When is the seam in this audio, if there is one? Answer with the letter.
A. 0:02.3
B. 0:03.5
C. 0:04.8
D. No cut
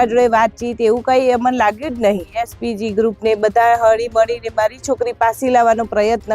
A